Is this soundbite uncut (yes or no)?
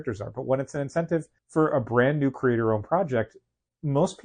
no